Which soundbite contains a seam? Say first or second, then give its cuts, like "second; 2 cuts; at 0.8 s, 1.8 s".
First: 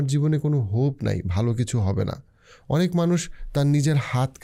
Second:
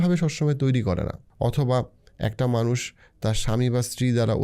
second; 1 cut; at 1.2 s